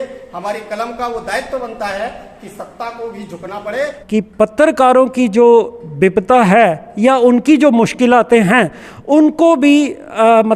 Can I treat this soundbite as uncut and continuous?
no; 1 cut; at 3.9 s

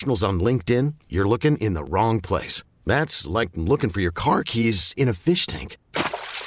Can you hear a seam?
no; 0 cuts

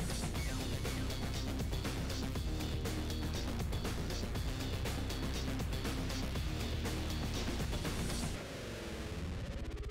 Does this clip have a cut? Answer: no; 0 cuts

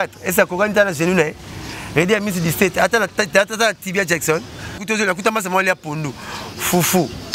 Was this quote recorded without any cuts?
no; 1 cut; at 4.8 s

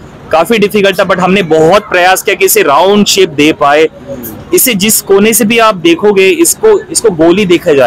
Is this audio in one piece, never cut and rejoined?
yes; 0 cuts

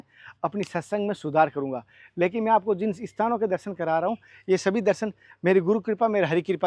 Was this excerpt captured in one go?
yes; 0 cuts

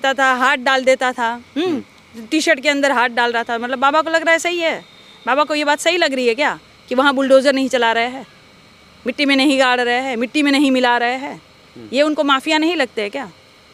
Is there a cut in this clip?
no; 0 cuts

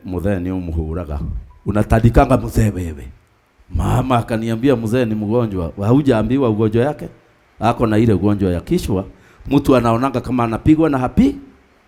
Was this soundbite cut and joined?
no; 0 cuts

